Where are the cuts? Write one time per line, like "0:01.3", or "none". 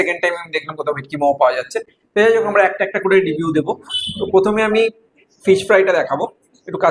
none